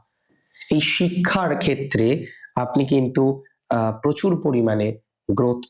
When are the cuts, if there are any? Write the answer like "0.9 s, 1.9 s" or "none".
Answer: none

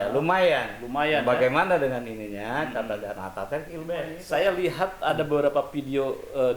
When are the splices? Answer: 4.2 s

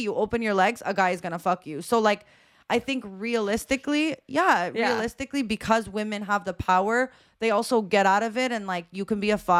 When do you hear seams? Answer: none

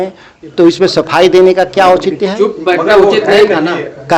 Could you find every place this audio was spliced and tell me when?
none

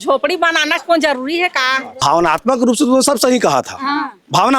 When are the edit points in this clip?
1.8 s

